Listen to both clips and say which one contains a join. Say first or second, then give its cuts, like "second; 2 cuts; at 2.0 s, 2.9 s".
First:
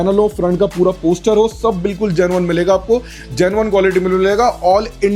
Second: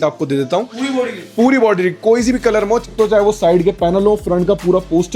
second; 1 cut; at 2.8 s